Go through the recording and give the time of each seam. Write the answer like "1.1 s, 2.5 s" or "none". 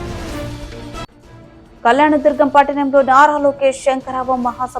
1.0 s